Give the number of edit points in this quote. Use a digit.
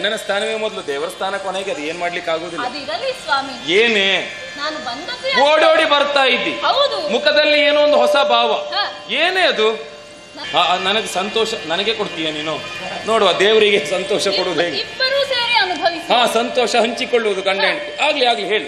1